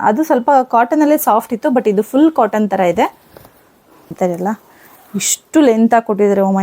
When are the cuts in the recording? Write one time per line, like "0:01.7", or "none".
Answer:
0:04.1